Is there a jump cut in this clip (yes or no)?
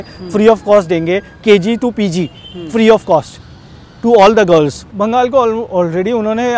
yes